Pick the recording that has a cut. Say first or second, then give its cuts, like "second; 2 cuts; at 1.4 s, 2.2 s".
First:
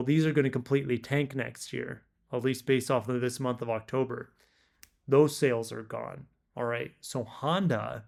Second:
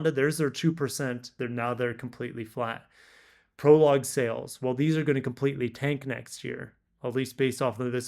second; 1 cut; at 1.3 s